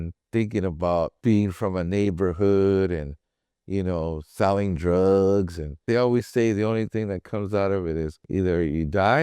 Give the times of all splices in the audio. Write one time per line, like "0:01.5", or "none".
0:01.1
0:05.8
0:08.2